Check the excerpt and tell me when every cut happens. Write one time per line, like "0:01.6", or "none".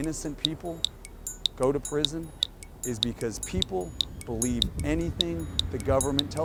none